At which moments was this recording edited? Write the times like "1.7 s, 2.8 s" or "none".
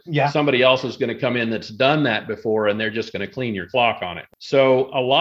4.2 s